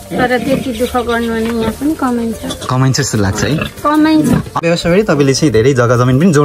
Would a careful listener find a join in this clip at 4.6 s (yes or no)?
yes